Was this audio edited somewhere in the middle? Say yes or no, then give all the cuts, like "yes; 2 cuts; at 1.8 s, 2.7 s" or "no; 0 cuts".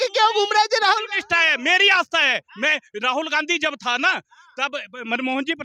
no; 0 cuts